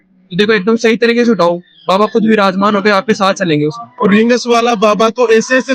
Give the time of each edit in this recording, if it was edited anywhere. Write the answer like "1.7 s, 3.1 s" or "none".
3.9 s